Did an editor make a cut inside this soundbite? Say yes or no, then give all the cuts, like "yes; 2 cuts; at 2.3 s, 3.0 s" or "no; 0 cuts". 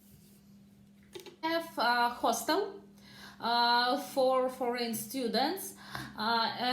yes; 1 cut; at 1.4 s